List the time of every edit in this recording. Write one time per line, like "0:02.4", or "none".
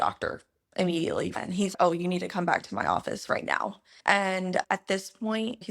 0:01.4
0:04.7